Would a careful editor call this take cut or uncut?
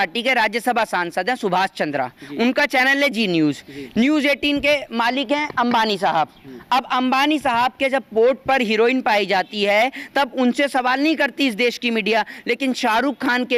uncut